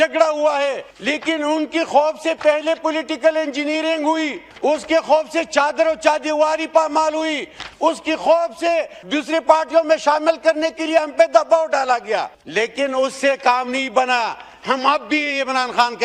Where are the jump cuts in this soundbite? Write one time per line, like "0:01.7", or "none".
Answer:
0:00.9
0:04.4
0:09.0
0:12.4